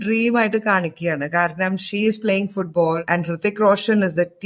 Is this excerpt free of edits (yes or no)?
no